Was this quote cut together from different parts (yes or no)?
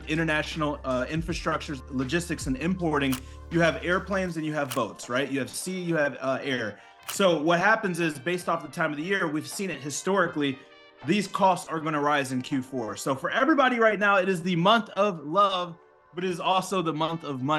no